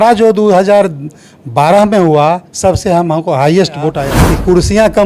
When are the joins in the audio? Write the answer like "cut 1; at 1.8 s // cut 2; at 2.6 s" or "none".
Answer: cut 1; at 4.1 s